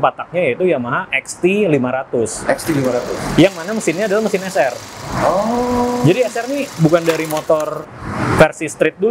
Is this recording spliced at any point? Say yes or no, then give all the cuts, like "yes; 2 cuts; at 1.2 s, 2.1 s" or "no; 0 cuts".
no; 0 cuts